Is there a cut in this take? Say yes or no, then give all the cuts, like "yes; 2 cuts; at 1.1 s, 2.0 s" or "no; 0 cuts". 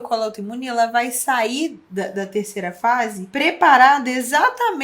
yes; 2 cuts; at 1.8 s, 3.2 s